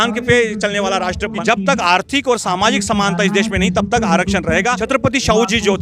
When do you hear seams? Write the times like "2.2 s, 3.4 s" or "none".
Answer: 1.4 s, 4.8 s